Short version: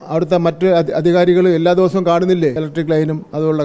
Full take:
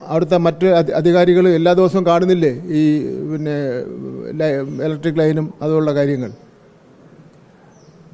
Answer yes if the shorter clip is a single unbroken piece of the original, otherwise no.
no